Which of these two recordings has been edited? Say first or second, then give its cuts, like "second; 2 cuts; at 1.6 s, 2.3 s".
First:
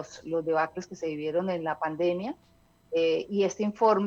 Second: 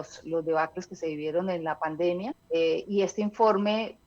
second; 1 cut; at 2.4 s